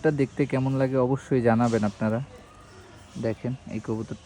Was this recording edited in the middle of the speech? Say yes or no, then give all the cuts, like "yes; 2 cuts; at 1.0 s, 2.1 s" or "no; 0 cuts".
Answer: no; 0 cuts